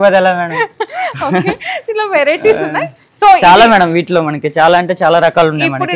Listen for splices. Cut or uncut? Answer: uncut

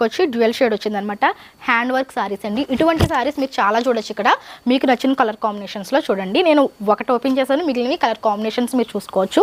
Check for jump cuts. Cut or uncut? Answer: uncut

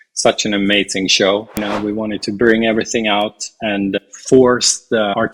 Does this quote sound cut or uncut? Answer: cut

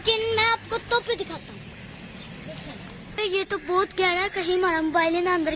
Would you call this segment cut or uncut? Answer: cut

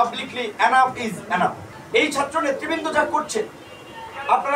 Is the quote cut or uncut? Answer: cut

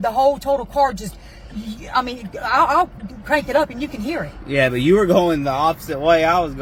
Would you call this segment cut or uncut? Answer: uncut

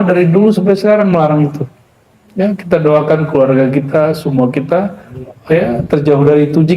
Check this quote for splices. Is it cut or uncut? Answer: uncut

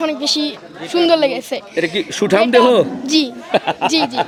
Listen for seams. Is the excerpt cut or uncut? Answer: uncut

